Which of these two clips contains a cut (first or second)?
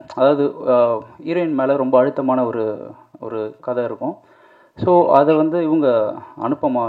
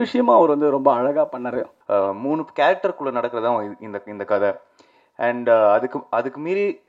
second